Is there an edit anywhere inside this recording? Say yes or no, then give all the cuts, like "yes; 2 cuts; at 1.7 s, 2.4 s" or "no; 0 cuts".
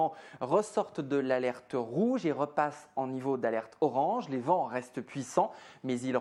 no; 0 cuts